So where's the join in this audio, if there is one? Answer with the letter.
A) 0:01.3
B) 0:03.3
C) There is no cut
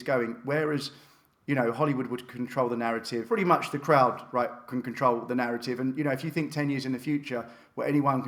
B